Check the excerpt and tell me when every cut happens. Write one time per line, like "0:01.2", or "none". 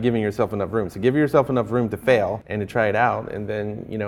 0:02.4